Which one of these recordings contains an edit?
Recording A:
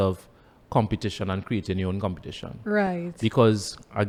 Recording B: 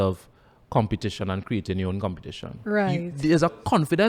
B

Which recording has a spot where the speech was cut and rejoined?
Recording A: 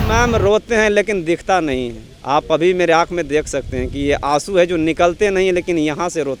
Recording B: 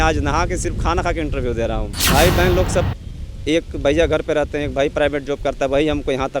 B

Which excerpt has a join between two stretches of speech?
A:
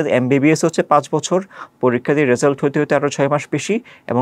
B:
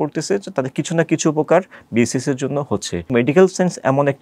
B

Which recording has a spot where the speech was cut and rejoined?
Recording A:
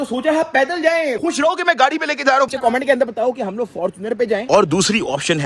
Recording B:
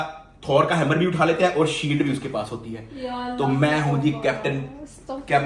A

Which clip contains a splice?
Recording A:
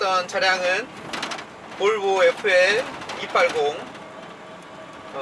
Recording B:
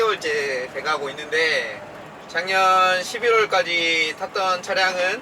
B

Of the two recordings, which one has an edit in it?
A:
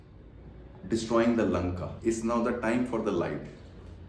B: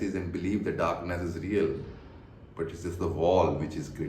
A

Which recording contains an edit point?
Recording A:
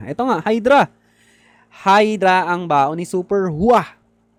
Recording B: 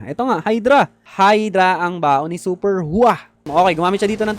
B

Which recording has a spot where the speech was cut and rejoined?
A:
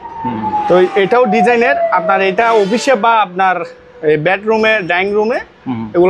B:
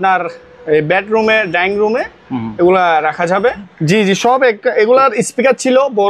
B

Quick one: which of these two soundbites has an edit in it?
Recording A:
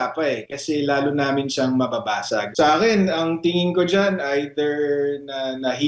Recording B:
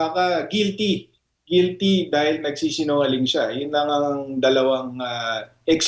A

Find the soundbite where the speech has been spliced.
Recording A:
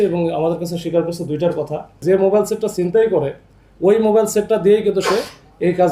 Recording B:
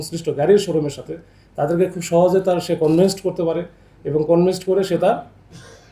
A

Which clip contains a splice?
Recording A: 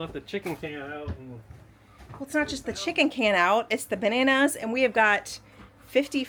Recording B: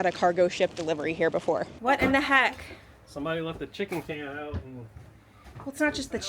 B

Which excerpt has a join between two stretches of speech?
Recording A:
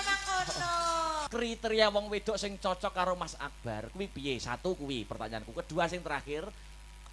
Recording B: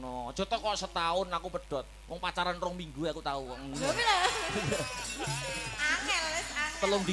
A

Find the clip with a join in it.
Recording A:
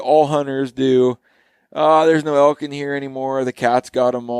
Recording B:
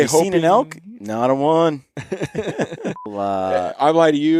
B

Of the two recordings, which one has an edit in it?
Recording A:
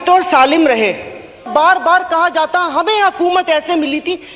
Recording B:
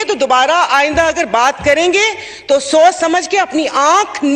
A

